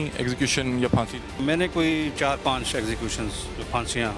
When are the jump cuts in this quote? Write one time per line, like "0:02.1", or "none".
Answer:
0:01.4

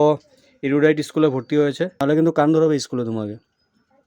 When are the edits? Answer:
0:02.0

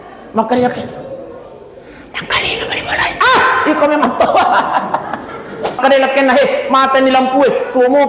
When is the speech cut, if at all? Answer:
0:05.8

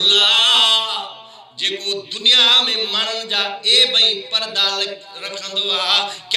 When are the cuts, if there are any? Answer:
none

